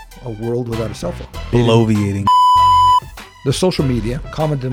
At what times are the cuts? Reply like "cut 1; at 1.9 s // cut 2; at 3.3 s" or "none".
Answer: cut 1; at 1.4 s // cut 2; at 2.1 s // cut 3; at 3.2 s